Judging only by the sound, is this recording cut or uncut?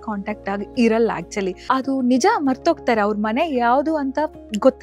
cut